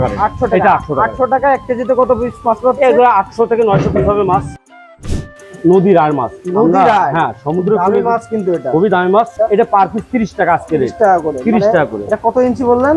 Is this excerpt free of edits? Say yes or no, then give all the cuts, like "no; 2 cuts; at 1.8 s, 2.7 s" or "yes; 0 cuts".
no; 2 cuts; at 5.0 s, 9.3 s